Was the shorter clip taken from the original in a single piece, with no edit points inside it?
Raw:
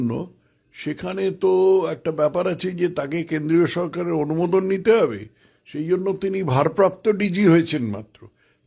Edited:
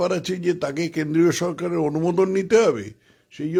yes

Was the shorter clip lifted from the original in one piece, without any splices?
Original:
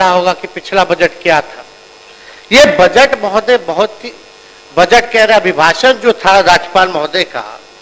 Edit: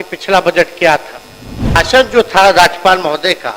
no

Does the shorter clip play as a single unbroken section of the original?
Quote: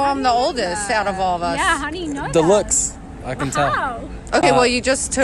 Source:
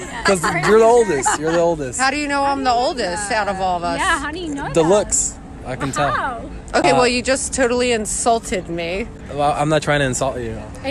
yes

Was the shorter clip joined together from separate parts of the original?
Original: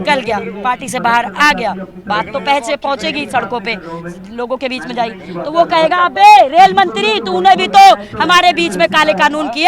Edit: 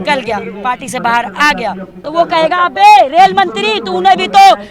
yes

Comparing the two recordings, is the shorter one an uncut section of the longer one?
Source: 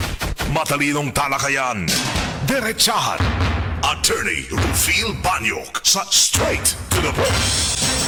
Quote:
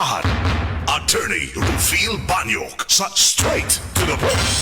yes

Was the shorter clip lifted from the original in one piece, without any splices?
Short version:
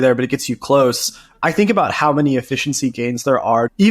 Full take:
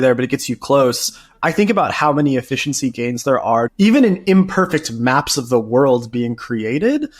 yes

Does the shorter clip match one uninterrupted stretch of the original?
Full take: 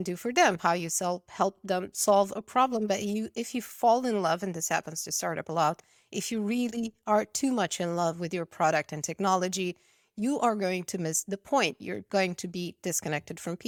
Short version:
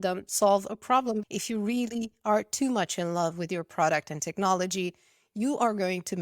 no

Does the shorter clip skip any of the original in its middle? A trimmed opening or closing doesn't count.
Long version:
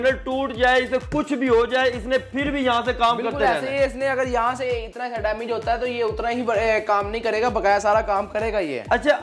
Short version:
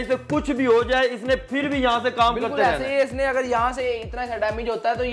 no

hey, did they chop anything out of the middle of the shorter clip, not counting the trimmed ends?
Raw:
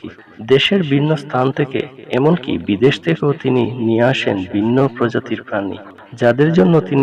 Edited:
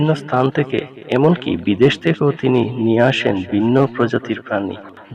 no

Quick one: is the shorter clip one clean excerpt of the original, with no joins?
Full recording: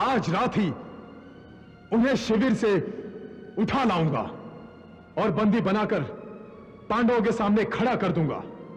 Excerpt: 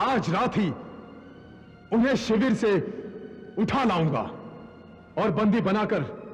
yes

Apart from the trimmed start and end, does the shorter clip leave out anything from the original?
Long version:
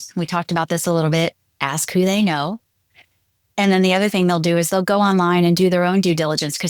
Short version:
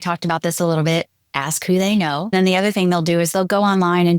yes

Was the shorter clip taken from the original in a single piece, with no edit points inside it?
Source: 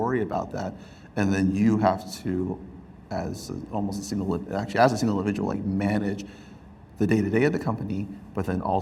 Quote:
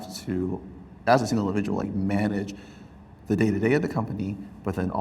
no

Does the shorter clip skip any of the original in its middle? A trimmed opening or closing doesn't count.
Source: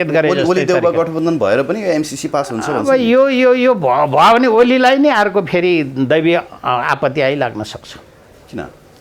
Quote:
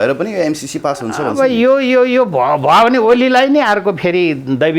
no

